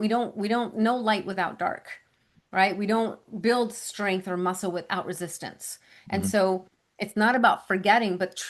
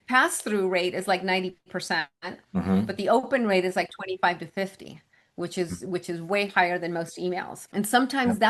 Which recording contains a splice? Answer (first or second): second